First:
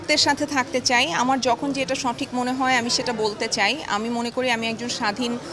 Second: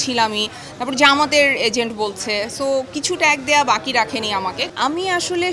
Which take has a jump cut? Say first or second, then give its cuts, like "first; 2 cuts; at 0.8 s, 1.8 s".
second; 1 cut; at 4.6 s